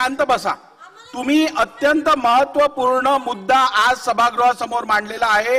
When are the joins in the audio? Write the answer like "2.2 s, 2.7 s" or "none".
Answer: none